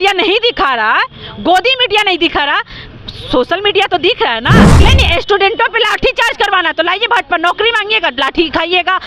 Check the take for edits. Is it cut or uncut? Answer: cut